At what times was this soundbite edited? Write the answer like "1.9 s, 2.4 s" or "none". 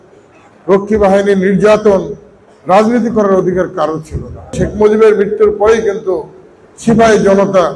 4.5 s